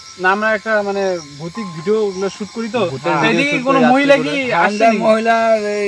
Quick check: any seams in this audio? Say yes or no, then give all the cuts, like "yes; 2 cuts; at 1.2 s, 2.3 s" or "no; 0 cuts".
no; 0 cuts